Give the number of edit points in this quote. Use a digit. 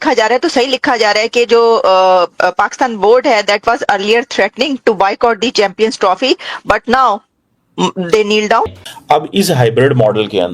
1